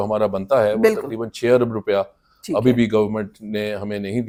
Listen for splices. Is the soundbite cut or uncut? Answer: uncut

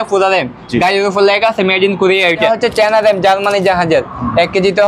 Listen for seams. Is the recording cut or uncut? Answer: cut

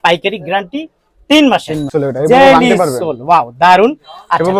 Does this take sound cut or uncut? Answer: cut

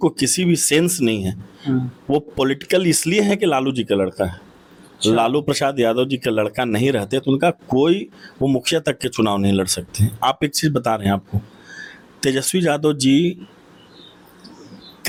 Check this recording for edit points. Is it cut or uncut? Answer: uncut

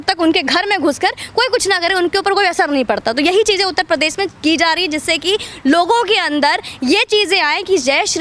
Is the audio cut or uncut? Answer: uncut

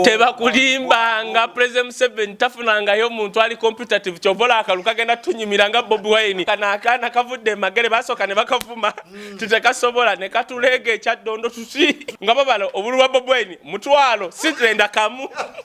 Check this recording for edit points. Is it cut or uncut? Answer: cut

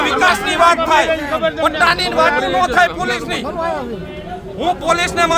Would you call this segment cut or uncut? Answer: uncut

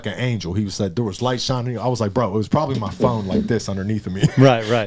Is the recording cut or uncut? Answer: uncut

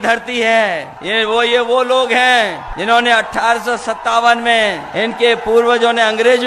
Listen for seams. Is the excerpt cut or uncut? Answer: cut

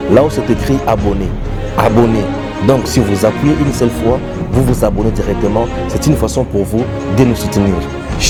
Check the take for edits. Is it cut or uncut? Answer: uncut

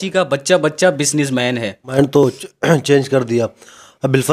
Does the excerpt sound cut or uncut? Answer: cut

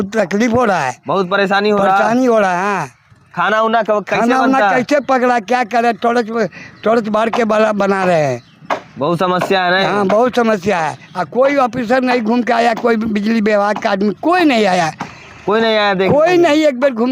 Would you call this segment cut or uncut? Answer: uncut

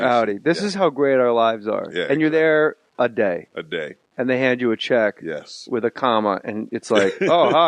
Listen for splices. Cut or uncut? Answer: cut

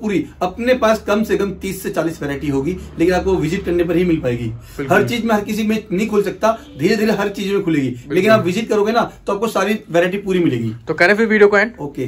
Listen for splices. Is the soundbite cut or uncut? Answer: uncut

